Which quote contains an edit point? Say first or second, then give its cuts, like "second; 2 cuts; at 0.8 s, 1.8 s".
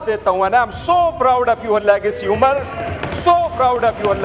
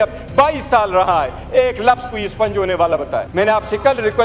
second; 1 cut; at 3.3 s